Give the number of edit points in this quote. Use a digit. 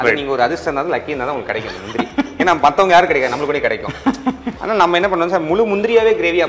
1